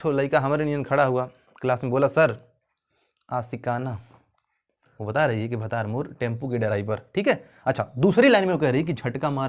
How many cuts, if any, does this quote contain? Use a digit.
1